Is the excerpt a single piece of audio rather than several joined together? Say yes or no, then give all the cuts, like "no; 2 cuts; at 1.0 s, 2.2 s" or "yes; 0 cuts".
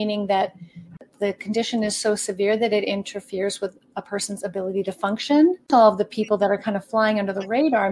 no; 2 cuts; at 1.0 s, 5.7 s